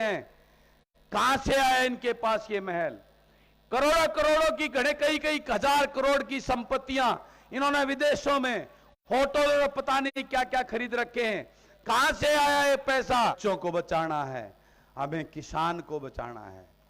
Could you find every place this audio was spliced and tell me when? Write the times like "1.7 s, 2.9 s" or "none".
13.4 s